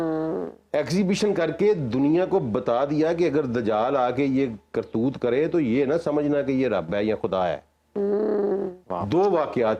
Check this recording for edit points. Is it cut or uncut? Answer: cut